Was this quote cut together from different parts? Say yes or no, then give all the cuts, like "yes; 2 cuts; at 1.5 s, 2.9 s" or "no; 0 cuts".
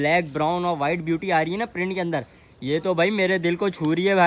no; 0 cuts